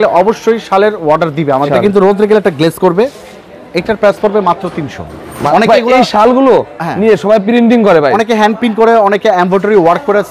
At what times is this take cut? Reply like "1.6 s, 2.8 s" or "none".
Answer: 1.7 s, 5.5 s